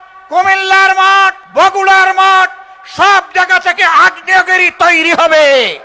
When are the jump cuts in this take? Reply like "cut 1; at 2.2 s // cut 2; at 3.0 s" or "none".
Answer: cut 1; at 1.4 s